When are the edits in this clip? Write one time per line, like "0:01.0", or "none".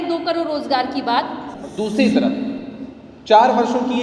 0:01.5